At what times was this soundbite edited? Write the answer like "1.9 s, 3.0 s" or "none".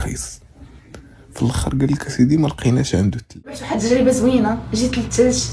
3.6 s